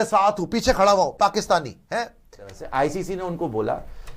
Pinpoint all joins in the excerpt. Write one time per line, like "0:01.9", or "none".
0:02.5